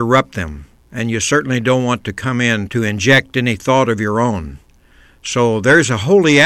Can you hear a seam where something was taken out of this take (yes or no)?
yes